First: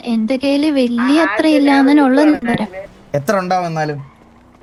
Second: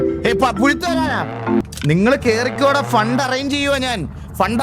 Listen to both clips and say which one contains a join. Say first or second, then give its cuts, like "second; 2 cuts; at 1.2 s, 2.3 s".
second; 1 cut; at 1.6 s